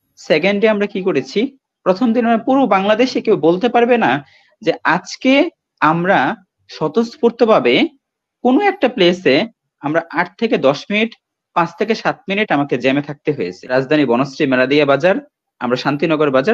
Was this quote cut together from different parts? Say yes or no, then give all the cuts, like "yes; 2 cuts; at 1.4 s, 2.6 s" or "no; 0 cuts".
yes; 1 cut; at 13.6 s